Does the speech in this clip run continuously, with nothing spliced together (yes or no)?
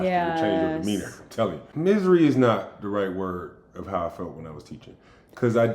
no